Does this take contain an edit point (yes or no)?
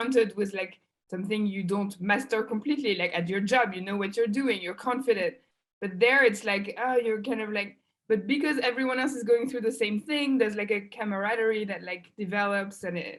no